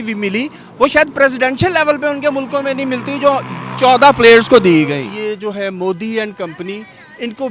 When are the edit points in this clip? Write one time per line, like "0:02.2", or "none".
0:05.0